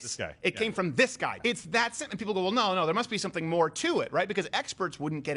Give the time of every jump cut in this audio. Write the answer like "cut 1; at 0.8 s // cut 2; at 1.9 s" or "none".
cut 1; at 1.3 s